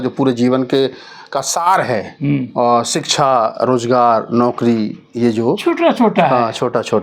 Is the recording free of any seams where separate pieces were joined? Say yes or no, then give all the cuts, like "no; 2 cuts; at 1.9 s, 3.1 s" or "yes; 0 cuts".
yes; 0 cuts